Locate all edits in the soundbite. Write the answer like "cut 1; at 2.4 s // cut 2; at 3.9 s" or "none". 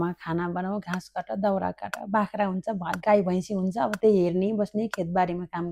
none